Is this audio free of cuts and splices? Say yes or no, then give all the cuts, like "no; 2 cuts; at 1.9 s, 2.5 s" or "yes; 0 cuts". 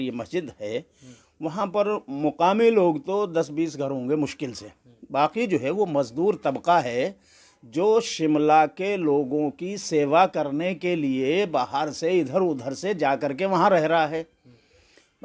yes; 0 cuts